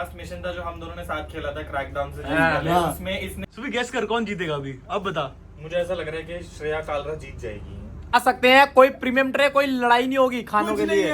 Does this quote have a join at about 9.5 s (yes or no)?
no